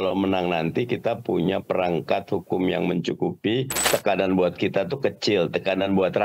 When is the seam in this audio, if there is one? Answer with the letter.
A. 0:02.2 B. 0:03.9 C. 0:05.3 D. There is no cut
B